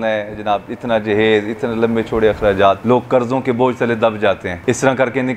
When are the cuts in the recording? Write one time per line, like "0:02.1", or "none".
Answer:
0:02.8
0:04.5